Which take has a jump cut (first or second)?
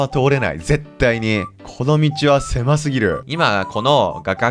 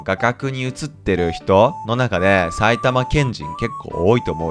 first